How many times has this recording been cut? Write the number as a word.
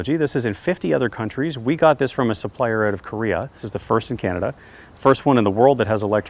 one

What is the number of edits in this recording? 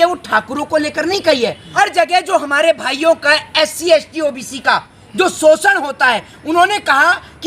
one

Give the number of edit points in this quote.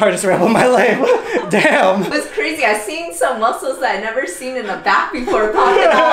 one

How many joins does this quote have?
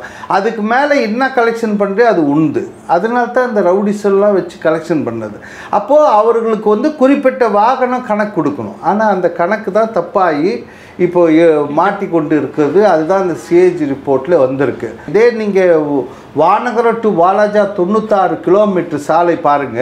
zero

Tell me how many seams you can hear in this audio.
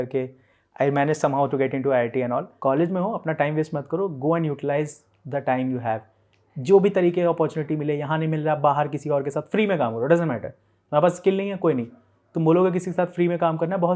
one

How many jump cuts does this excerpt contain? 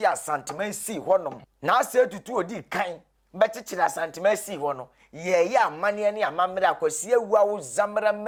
zero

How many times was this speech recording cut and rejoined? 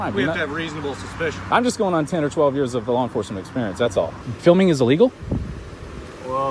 one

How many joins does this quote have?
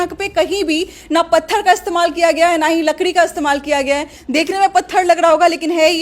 one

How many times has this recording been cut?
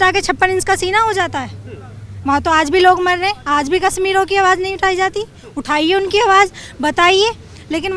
zero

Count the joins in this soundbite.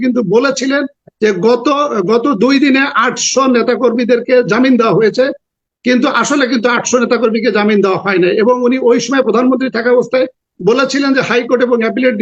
zero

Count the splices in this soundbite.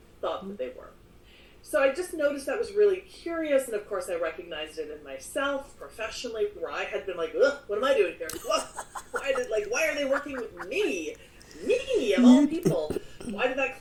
zero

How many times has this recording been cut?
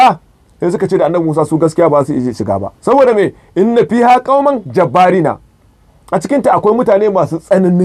zero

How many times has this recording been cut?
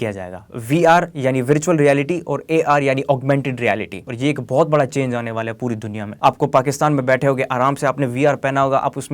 two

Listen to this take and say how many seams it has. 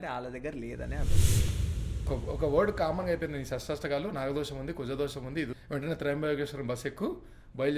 two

